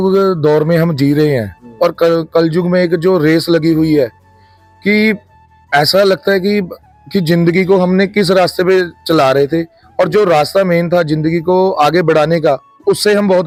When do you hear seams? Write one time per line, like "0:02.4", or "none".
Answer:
none